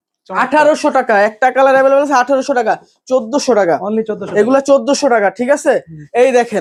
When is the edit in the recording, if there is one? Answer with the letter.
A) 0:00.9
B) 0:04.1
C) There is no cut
C